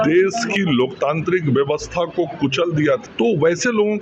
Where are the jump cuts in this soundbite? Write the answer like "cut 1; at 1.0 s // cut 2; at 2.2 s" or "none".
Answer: cut 1; at 3.1 s